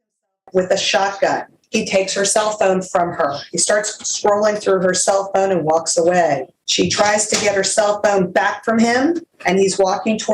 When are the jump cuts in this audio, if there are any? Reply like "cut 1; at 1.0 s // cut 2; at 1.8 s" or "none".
cut 1; at 1.6 s // cut 2; at 6.6 s // cut 3; at 9.3 s